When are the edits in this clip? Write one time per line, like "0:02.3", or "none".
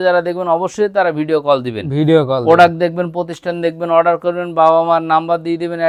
none